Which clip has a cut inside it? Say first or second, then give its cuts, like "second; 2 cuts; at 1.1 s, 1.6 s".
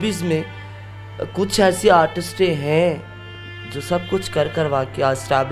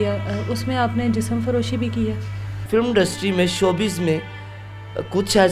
second; 1 cut; at 2.6 s